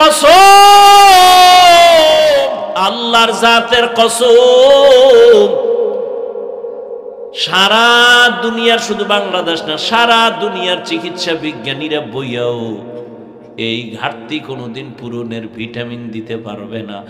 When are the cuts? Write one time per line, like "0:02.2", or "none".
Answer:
0:02.6